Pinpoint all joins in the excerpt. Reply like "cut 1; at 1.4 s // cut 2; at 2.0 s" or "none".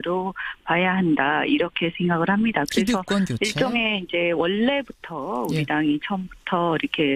cut 1; at 4.6 s